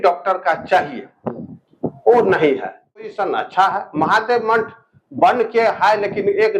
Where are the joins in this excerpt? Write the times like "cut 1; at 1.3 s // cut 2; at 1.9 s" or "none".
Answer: cut 1; at 3.2 s